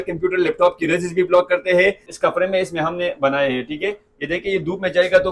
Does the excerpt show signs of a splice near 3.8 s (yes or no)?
no